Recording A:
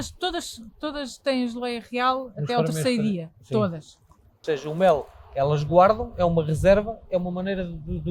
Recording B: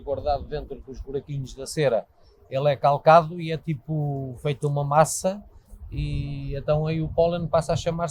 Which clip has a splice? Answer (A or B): A